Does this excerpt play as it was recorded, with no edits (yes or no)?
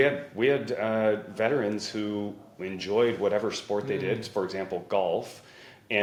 yes